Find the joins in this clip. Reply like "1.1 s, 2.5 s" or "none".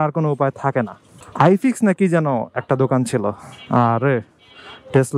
1.1 s